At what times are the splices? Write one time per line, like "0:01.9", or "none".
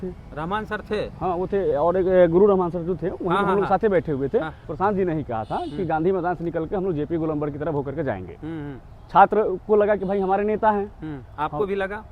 0:04.7